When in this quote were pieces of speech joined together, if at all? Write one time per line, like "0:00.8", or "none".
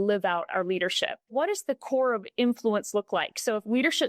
0:01.3